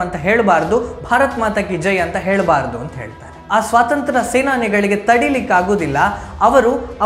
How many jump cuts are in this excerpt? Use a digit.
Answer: 1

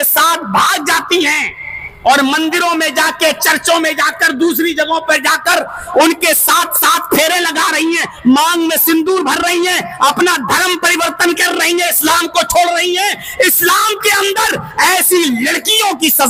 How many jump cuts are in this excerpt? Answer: 0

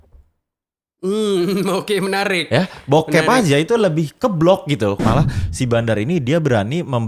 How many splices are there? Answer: 1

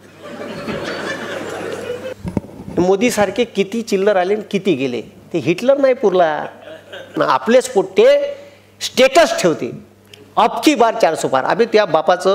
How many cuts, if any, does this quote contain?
2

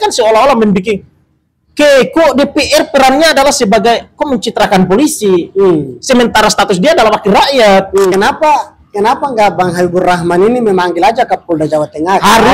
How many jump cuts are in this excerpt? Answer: 1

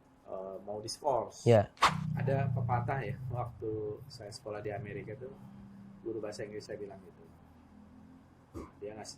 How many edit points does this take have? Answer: 1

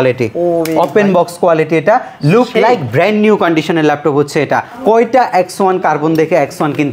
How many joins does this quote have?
1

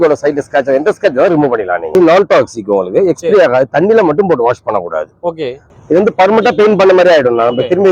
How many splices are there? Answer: 2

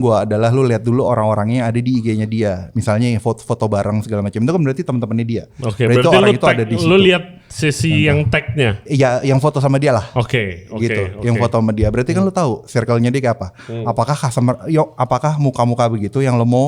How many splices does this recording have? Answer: 0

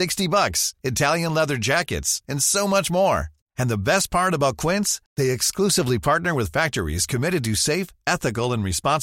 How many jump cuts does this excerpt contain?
0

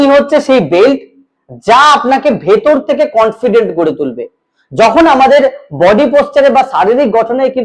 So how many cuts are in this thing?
0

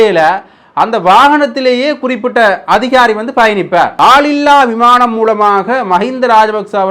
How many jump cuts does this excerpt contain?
1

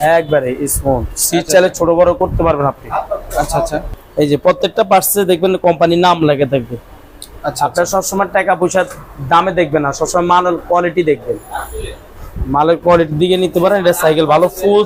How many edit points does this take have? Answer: 0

